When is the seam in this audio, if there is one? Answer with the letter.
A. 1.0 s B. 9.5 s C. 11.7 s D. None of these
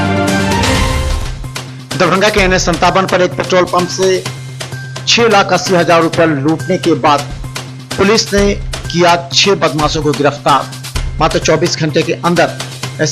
A